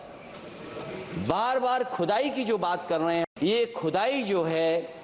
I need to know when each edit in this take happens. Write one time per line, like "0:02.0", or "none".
0:03.3

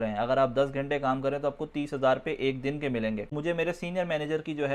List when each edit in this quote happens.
0:03.3

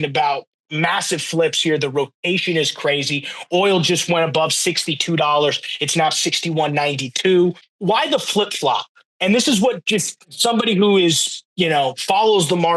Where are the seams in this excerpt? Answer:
0:07.7

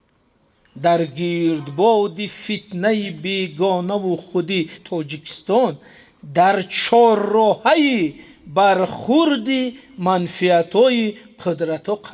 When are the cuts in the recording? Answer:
0:04.8

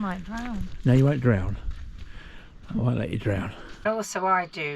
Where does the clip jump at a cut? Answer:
0:03.8

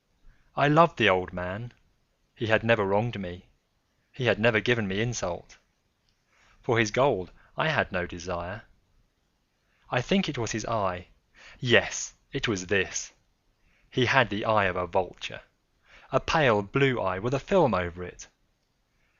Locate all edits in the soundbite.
0:06.1

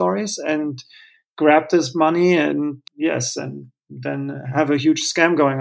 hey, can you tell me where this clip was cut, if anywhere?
none

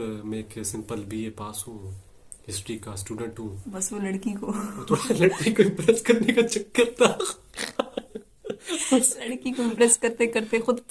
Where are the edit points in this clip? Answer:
none

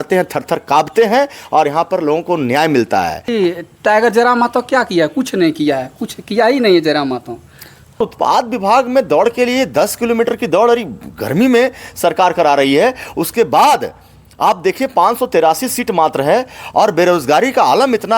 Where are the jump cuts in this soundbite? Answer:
0:03.3
0:08.0

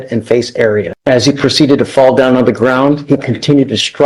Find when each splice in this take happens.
0:00.9

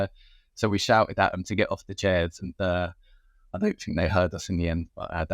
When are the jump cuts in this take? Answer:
none

